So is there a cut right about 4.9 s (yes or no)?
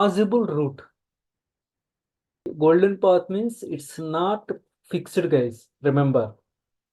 no